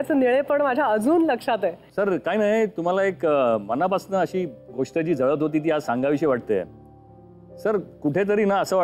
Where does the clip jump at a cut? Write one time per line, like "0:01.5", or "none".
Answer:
0:01.9